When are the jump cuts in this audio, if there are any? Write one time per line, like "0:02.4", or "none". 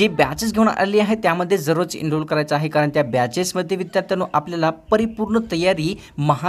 none